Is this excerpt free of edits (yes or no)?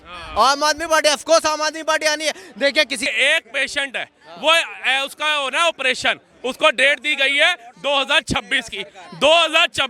no